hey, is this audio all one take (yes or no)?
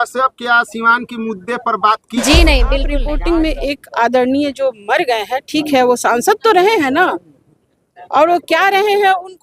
no